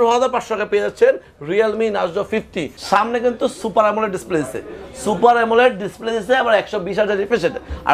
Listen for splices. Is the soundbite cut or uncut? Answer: cut